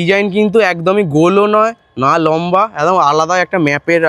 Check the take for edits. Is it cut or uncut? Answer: uncut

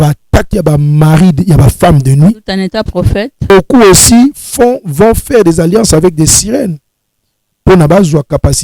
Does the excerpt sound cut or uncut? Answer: cut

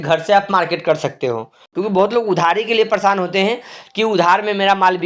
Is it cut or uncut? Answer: cut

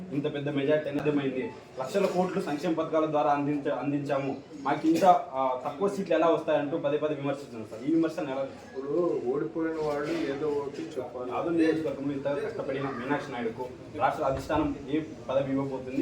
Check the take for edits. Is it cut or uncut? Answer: cut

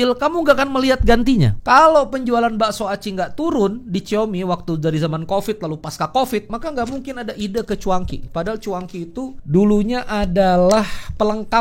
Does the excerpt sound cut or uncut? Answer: cut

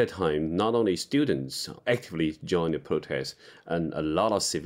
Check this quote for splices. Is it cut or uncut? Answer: cut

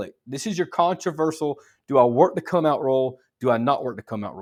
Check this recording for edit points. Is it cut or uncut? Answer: uncut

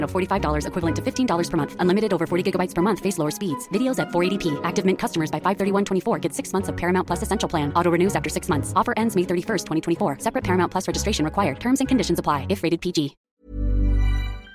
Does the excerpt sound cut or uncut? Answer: cut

